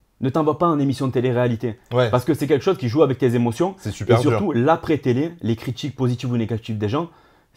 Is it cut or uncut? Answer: uncut